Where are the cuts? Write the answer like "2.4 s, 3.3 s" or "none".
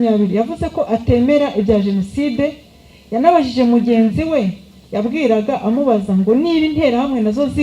none